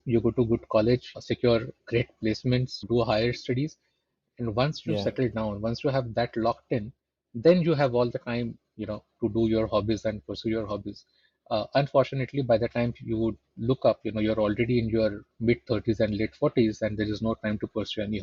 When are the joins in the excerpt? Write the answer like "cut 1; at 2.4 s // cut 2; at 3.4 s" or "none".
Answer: none